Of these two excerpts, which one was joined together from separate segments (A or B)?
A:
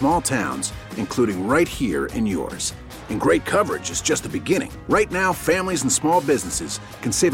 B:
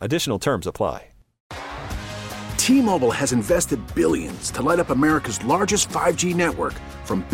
B